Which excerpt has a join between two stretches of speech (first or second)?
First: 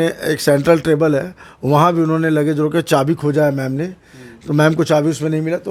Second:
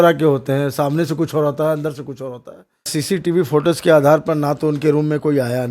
second